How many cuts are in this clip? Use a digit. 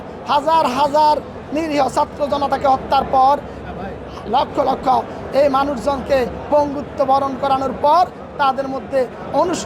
0